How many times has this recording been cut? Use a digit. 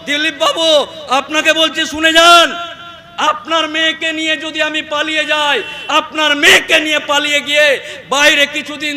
0